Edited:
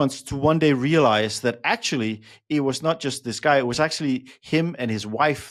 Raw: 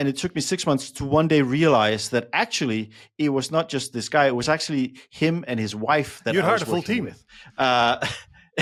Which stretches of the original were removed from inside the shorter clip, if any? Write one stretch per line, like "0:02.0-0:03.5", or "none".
none